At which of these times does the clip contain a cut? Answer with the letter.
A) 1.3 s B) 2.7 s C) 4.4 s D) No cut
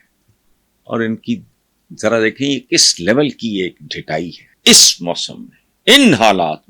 C